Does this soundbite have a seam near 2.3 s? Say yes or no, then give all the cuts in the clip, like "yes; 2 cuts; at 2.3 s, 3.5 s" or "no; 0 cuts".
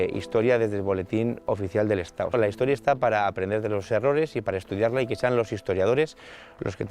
yes; 1 cut; at 2.3 s